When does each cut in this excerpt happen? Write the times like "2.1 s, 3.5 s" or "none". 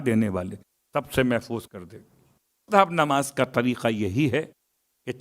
2.6 s

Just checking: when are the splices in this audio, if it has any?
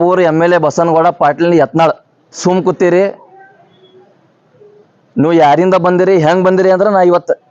2.4 s

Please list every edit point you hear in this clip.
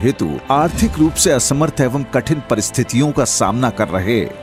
none

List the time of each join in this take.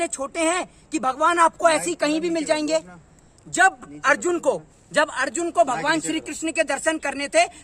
none

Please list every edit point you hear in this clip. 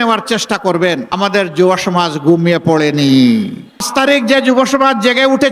1.1 s, 3.9 s

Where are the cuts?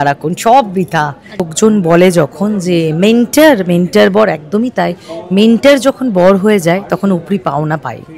1.5 s

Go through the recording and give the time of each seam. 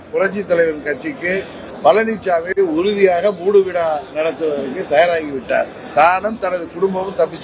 1.6 s, 5.8 s

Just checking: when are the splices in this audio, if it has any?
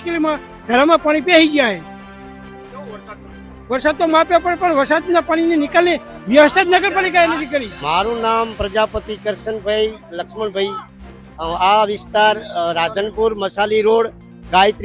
7.8 s

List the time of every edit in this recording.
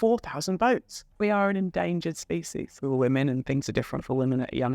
1.0 s, 2.6 s

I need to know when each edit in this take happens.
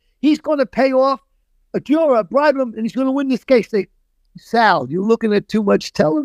none

